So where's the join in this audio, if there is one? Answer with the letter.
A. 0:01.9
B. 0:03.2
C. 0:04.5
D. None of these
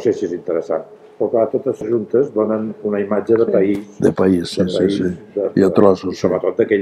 A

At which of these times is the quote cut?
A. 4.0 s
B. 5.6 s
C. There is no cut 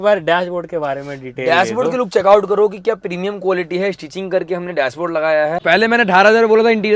B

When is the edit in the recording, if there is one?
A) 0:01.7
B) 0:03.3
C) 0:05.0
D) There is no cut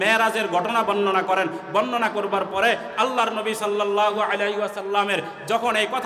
D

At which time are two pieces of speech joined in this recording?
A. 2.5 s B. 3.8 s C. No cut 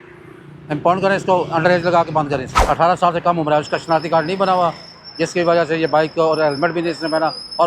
A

